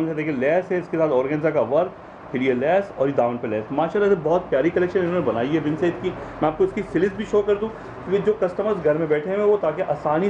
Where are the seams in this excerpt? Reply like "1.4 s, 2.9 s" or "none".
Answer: none